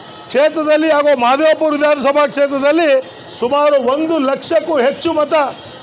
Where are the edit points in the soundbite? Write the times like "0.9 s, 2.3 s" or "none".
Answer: none

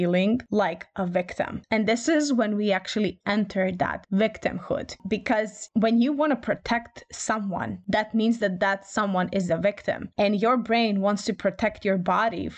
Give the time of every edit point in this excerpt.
none

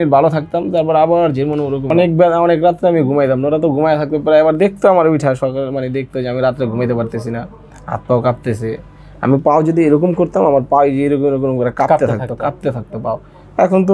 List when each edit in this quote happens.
1.9 s

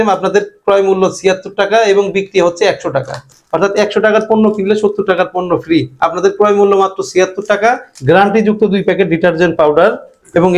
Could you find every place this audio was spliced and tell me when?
3.3 s, 7.9 s

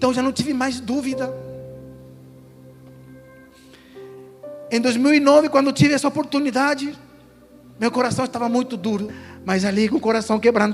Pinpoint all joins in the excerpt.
9.3 s

